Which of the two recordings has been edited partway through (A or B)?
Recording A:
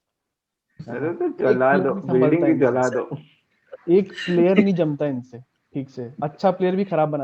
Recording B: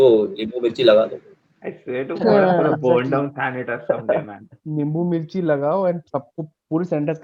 B